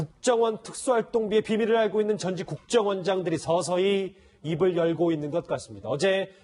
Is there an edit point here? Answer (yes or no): no